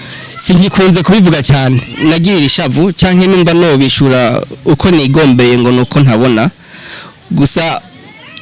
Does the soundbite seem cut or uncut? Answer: cut